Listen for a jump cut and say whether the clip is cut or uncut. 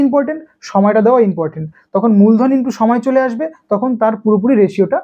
uncut